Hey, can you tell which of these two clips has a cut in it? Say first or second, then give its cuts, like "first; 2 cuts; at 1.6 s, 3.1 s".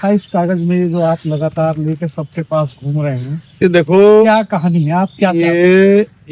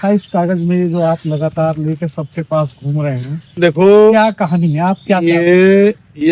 second; 1 cut; at 3.6 s